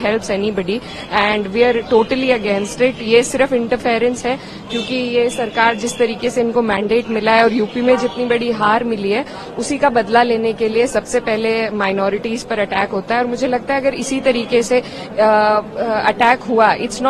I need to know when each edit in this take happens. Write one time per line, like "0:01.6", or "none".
none